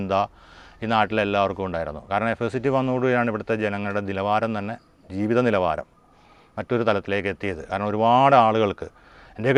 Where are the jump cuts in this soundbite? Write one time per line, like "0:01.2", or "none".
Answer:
none